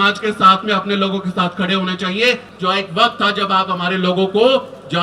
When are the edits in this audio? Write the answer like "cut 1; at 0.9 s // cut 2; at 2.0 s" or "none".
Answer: cut 1; at 2.5 s